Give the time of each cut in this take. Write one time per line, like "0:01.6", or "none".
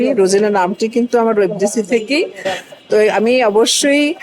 none

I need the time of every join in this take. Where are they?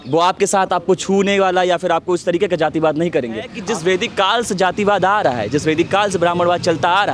0:03.6

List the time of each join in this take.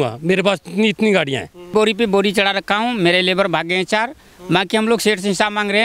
0:01.7

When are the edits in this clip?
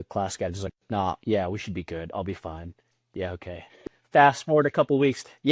0:03.9

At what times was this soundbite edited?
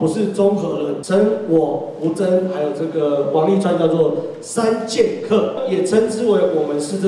0:01.0
0:05.6

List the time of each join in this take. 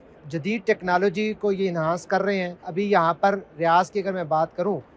0:02.6

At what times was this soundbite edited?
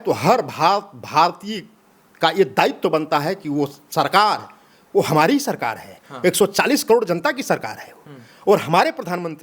none

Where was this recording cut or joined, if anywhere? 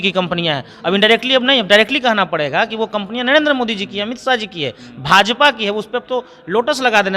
none

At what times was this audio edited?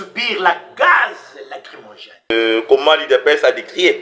0:02.3

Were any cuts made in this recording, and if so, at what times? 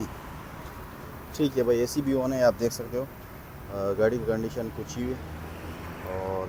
none

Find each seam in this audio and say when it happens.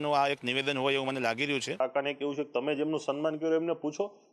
0:01.8

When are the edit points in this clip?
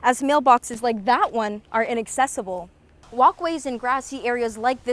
0:02.8

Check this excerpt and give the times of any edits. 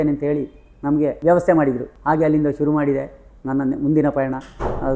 0:01.2
0:01.9

